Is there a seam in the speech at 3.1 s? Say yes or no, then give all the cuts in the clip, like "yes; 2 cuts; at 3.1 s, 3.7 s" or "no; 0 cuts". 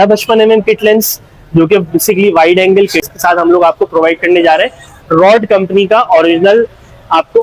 yes; 1 cut; at 3.1 s